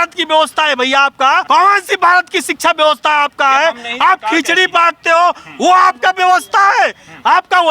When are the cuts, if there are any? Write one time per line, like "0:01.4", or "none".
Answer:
0:01.4